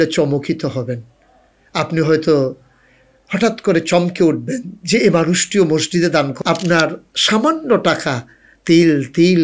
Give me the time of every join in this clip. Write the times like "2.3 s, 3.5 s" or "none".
6.3 s